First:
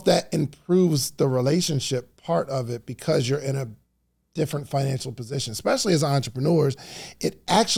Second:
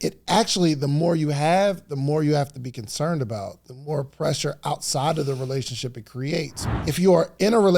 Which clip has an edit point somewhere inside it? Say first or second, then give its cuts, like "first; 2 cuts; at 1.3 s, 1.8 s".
second; 1 cut; at 6.6 s